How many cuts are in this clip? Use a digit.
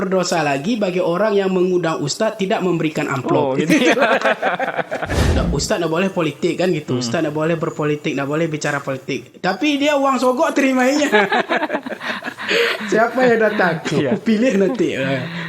1